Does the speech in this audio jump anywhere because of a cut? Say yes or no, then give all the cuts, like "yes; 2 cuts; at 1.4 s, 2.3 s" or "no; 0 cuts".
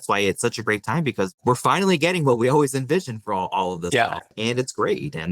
yes; 2 cuts; at 1.4 s, 4.4 s